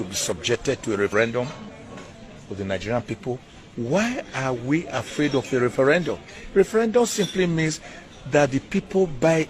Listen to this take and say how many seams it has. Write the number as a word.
one